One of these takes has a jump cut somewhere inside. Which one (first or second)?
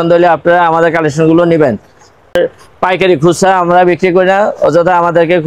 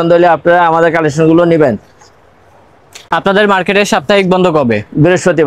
first